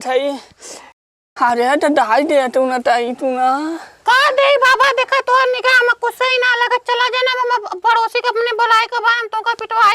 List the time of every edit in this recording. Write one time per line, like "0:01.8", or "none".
0:01.2